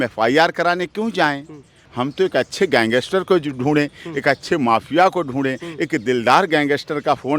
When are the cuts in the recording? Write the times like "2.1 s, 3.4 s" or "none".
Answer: 1.8 s